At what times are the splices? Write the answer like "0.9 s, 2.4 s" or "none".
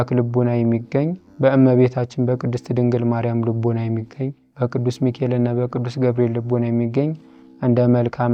1.2 s, 4.4 s